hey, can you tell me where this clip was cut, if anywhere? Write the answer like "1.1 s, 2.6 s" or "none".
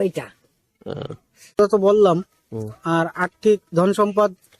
1.6 s